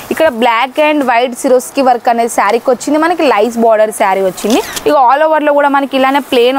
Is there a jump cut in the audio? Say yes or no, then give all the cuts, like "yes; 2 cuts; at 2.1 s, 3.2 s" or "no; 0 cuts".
yes; 1 cut; at 4.7 s